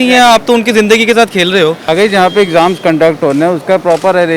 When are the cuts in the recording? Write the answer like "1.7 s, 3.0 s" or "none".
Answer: 1.8 s